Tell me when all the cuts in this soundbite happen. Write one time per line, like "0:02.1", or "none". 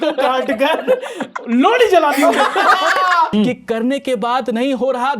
0:03.3